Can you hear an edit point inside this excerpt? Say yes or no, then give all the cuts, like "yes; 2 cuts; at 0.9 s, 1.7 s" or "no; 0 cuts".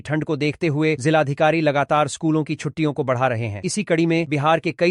no; 0 cuts